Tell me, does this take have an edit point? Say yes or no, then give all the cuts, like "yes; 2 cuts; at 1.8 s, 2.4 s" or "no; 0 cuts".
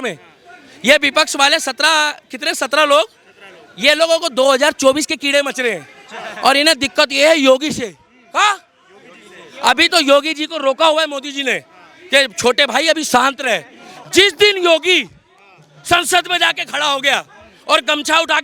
no; 0 cuts